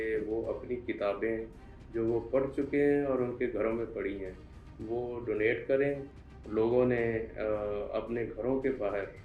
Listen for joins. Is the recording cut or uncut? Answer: cut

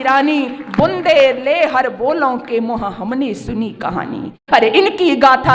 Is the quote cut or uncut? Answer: cut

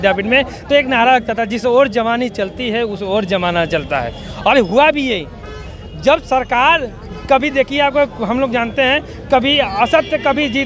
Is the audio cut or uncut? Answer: uncut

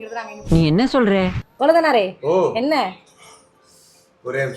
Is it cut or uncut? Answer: cut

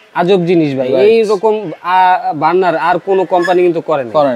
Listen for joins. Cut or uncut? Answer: uncut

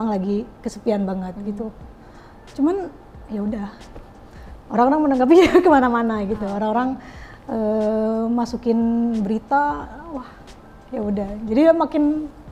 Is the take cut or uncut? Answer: uncut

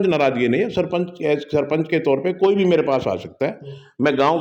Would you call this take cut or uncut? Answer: uncut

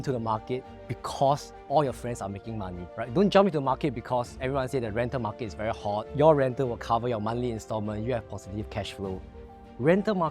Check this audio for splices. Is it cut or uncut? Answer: cut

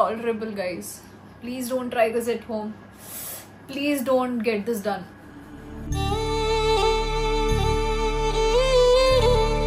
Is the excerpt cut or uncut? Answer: uncut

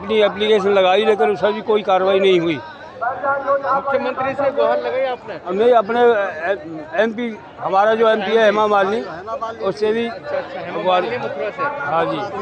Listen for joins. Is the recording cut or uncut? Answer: uncut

